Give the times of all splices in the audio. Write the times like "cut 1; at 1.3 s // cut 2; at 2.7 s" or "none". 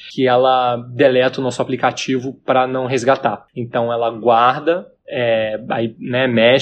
cut 1; at 3.5 s // cut 2; at 5.0 s